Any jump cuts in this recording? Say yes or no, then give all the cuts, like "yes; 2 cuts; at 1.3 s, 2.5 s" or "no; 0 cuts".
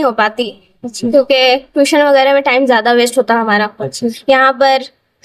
no; 0 cuts